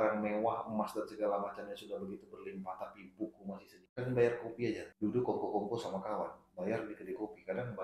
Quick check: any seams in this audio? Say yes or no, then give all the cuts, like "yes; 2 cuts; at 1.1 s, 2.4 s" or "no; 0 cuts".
yes; 2 cuts; at 3.8 s, 4.9 s